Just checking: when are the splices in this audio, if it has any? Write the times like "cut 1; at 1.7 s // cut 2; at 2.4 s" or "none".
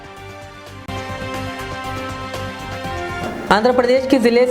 cut 1; at 0.8 s // cut 2; at 3.2 s